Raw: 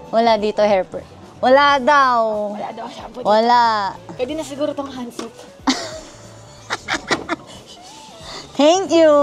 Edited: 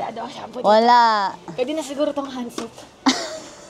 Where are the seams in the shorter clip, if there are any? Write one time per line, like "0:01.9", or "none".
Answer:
none